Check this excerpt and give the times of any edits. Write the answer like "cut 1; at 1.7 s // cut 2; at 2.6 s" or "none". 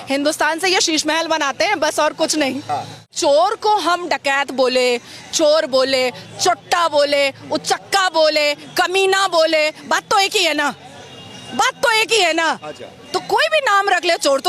cut 1; at 3.1 s